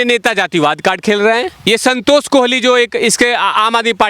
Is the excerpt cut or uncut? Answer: cut